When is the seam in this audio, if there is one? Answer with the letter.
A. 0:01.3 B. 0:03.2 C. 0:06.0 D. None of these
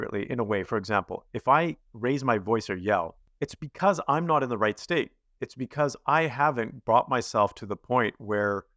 B